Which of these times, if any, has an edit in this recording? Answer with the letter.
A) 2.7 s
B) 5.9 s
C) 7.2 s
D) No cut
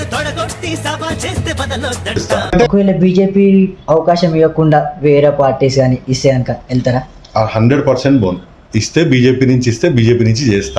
A